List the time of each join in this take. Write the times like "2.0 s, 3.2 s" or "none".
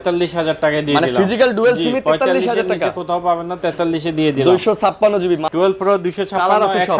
5.5 s